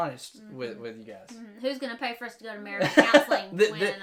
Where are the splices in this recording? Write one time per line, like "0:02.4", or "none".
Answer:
none